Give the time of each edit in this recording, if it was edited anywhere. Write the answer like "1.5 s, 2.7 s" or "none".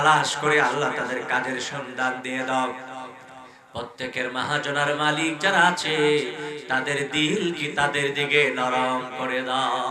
none